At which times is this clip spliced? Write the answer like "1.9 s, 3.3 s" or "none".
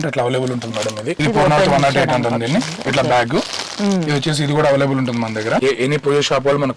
1.1 s, 5.6 s